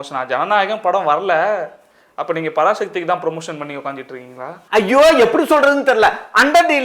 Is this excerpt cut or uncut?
cut